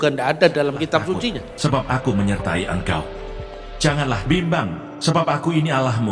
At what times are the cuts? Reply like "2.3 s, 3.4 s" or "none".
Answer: 1.5 s

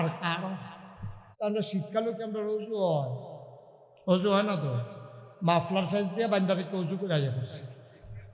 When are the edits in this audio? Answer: 1.2 s

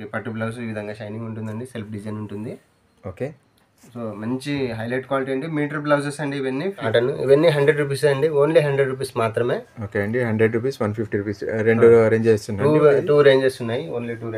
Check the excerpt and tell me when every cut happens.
6.9 s

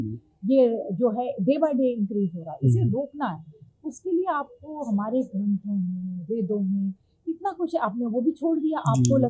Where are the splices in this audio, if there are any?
none

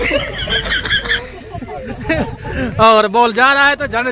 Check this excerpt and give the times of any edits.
none

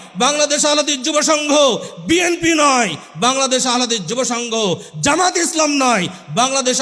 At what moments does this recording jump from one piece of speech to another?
none

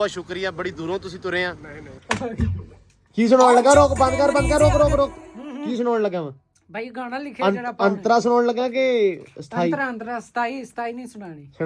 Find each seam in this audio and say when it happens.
2.0 s

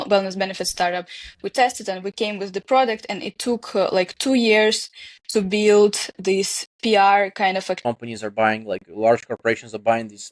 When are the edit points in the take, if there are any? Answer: 7.8 s

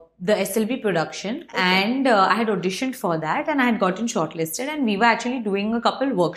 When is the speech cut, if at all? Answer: none

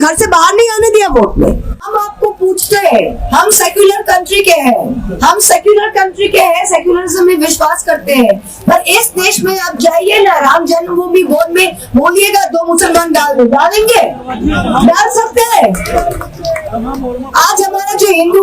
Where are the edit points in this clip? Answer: 1.8 s

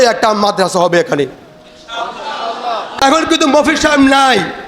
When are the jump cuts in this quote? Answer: 2.9 s

